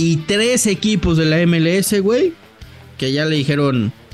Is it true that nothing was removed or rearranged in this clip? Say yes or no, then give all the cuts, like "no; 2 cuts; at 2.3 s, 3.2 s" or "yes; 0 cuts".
yes; 0 cuts